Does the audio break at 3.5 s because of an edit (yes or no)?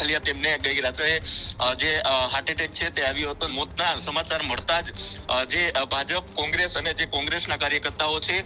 yes